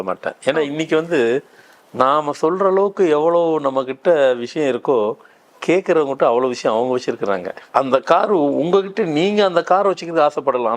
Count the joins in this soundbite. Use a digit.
1